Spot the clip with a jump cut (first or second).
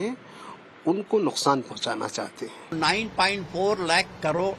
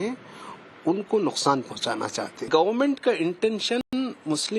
first